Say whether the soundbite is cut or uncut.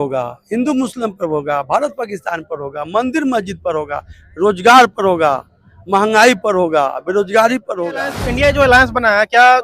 cut